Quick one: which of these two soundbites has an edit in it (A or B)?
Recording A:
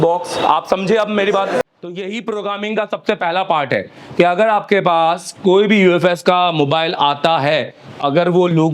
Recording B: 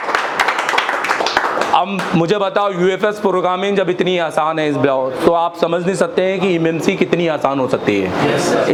A